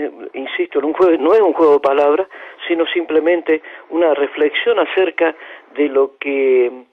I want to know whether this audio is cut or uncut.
uncut